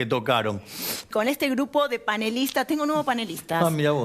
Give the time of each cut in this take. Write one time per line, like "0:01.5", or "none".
0:01.0